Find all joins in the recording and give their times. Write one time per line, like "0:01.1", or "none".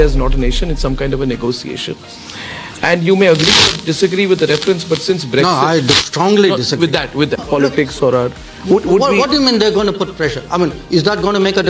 0:07.4